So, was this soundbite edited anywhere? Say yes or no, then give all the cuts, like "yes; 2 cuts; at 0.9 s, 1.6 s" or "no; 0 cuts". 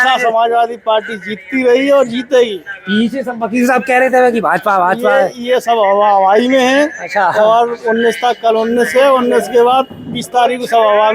no; 0 cuts